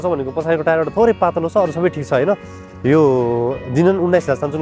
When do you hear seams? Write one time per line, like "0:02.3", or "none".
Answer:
none